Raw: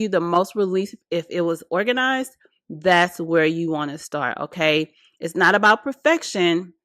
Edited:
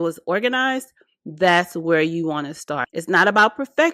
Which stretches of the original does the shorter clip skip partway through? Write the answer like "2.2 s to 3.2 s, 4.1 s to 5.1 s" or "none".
4.3 s to 5.1 s